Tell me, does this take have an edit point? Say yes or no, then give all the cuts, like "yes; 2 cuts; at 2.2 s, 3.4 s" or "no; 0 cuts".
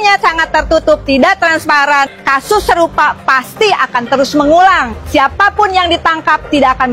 yes; 2 cuts; at 2.2 s, 4.9 s